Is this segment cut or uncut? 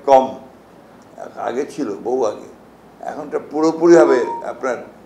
uncut